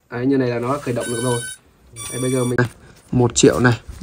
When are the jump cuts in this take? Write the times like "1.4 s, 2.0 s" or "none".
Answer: 2.5 s